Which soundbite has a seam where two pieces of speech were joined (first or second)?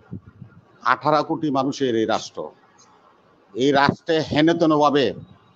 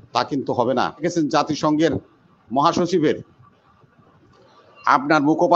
second